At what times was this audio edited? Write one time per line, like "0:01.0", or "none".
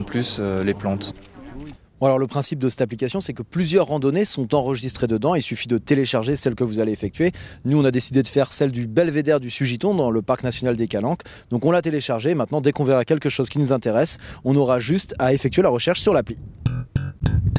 0:06.1